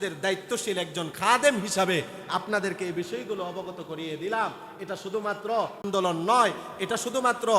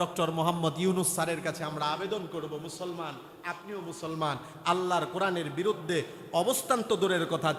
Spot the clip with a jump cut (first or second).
first